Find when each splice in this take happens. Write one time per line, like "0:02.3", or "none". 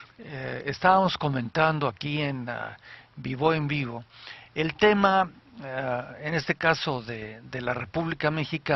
none